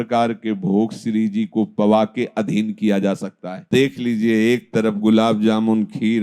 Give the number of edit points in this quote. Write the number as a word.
one